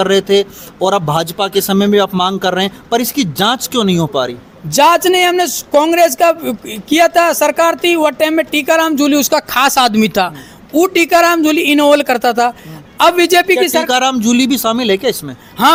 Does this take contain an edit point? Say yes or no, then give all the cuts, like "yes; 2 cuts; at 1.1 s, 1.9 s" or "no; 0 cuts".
no; 0 cuts